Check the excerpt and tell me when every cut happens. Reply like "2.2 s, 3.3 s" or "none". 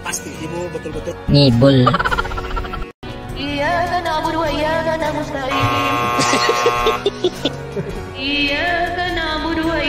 3.1 s